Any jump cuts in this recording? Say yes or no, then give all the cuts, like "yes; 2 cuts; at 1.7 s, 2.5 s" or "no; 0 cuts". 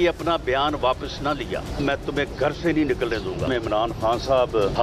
yes; 2 cuts; at 1.7 s, 3.5 s